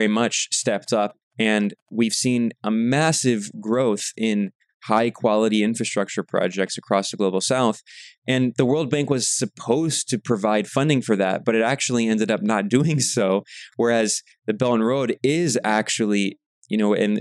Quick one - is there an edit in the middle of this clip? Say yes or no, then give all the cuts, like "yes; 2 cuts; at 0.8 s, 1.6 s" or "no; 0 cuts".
yes; 1 cut; at 1.2 s